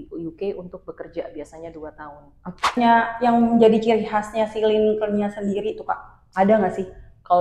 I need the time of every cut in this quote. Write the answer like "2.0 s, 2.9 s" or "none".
2.8 s